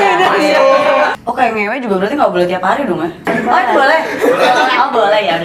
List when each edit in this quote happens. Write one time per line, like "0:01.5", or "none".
0:01.1
0:03.3